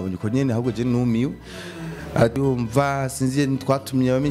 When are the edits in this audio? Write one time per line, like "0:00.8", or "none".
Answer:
0:02.4